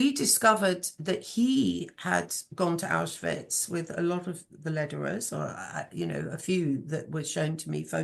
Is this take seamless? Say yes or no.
yes